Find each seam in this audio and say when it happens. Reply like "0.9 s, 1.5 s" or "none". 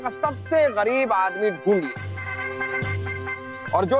none